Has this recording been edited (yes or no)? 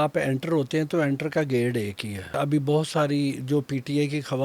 yes